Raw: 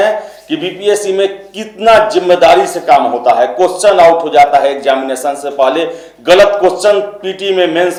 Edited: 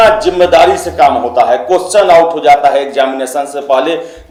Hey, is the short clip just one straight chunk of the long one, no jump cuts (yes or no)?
yes